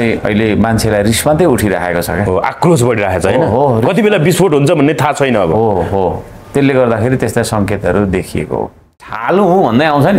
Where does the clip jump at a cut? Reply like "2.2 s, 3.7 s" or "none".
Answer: 9.0 s